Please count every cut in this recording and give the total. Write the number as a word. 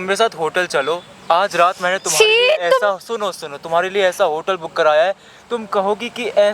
zero